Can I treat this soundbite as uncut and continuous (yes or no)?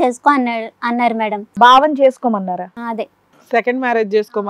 no